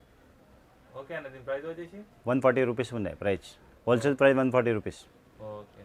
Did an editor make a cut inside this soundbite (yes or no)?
no